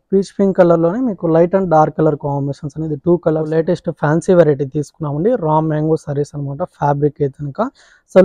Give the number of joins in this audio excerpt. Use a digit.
1